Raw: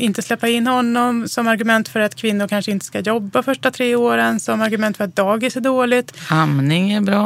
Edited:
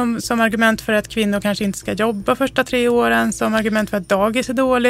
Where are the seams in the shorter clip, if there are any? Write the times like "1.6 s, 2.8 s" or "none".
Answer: none